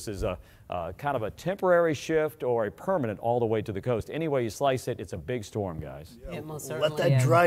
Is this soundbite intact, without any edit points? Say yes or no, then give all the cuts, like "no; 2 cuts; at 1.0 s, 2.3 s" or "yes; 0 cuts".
yes; 0 cuts